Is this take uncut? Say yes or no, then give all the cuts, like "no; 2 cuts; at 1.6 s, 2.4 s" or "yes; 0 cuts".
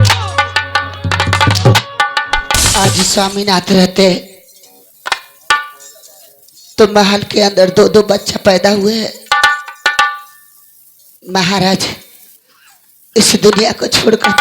no; 1 cut; at 2.7 s